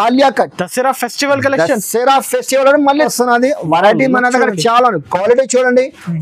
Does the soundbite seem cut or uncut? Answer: cut